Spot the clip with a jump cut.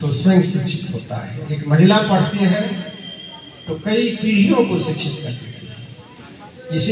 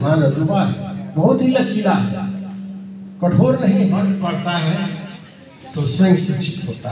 second; 1 cut; at 4.2 s

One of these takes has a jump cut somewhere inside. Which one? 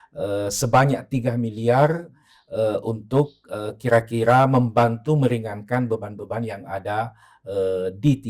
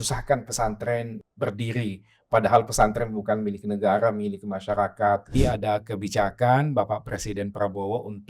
second; 2 cuts; at 1.2 s, 5.4 s

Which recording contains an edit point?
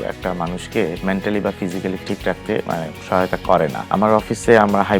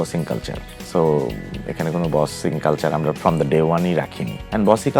first; 3 cuts; at 1.0 s, 2.0 s, 3.9 s

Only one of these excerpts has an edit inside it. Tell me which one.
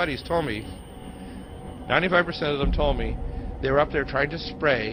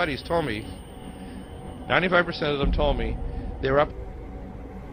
first; 1 cut; at 3.9 s

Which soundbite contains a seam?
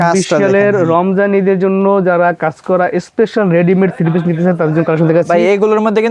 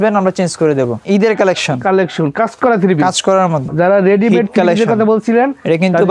second; 2 cuts; at 1.0 s, 3.7 s

